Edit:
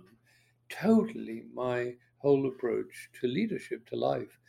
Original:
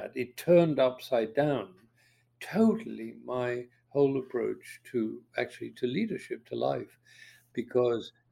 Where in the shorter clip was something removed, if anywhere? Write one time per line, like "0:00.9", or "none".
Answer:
0:03.0